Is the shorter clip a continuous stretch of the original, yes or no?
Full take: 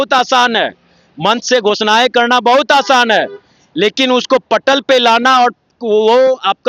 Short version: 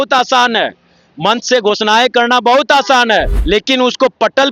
no